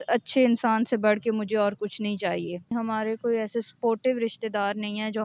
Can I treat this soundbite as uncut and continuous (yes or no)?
no